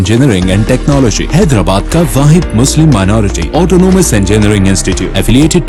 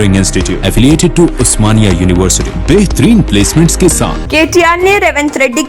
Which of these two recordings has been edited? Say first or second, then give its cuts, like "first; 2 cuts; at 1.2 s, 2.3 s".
second; 1 cut; at 4.2 s